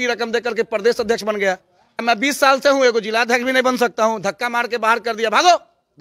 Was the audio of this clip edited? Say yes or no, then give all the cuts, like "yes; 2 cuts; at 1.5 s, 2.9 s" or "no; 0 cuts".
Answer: yes; 1 cut; at 2.0 s